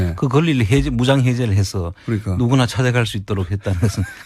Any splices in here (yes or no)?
no